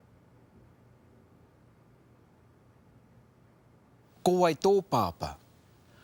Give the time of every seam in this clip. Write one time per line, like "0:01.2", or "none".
none